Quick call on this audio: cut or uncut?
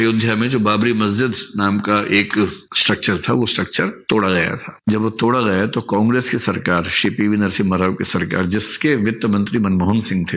uncut